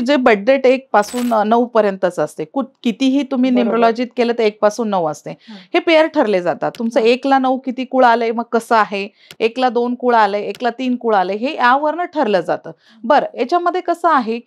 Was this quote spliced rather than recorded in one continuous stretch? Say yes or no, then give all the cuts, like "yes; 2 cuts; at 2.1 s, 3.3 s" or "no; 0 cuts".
no; 0 cuts